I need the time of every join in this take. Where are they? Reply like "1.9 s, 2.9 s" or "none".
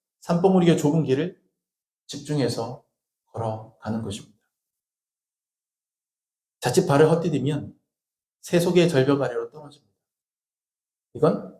none